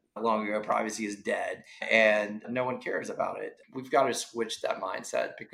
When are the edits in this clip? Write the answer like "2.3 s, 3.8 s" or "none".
3.5 s